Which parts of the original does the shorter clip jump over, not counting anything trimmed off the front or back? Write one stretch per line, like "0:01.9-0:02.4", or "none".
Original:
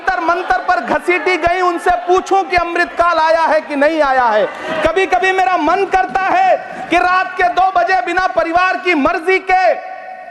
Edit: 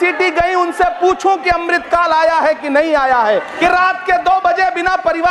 0:04.6-0:06.8